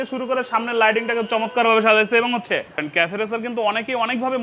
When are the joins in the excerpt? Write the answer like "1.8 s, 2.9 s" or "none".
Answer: 2.9 s